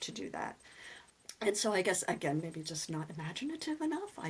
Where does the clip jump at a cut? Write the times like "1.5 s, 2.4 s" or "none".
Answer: none